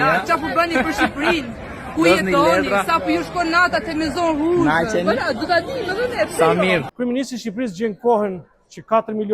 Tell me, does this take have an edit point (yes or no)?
yes